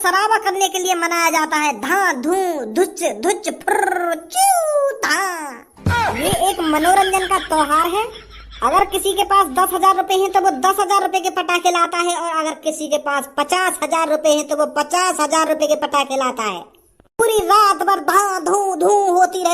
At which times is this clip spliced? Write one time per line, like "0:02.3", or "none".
none

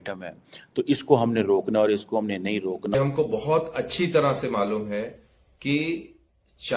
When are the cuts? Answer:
0:02.9

